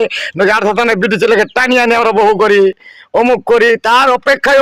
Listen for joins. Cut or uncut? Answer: uncut